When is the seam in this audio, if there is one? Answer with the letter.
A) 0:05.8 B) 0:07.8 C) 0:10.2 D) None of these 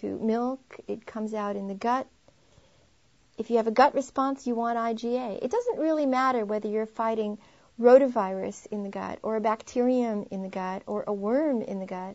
C